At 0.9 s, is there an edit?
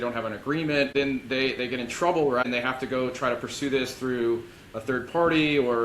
yes; 2 cuts; at 0.9 s, 2.4 s

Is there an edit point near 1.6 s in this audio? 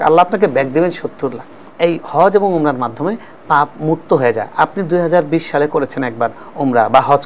yes; 1 cut; at 1.6 s

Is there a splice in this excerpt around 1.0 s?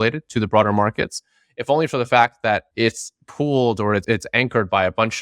no; 2 cuts; at 2.7 s, 4.0 s

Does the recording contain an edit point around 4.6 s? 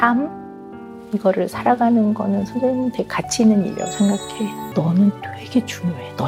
yes; 1 cut; at 4.6 s

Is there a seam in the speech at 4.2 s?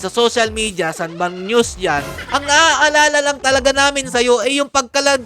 no; 1 cut; at 2.2 s

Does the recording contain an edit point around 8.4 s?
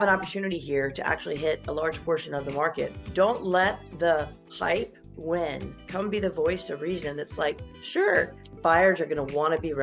yes; 2 cuts; at 3.0 s, 8.4 s

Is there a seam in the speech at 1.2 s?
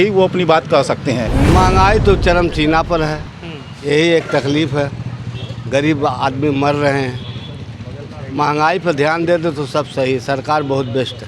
yes; 1 cut; at 1.2 s

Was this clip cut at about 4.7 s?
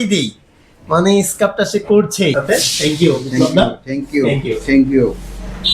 no; 1 cut; at 2.3 s

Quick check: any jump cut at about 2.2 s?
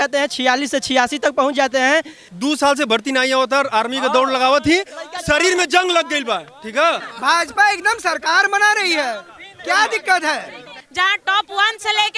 yes; 3 cuts; at 2.2 s, 7.1 s, 10.8 s

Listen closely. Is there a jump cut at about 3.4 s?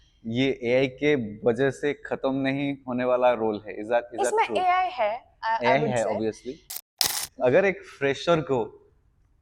no; 1 cut; at 6.7 s

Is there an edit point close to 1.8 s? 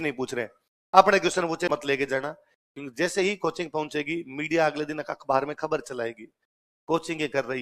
yes; 1 cut; at 1.8 s

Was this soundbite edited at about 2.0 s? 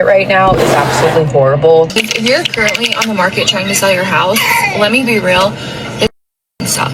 yes; 1 cut; at 2.0 s

